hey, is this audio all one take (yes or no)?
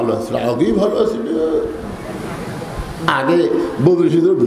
yes